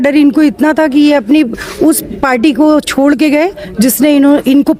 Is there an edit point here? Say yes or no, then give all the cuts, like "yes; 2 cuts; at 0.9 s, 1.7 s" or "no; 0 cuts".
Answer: no; 0 cuts